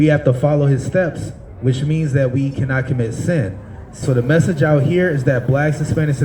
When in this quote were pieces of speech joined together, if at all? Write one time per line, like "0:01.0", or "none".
0:04.0